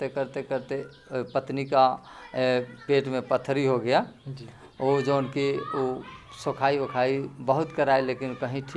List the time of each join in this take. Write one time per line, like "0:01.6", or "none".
none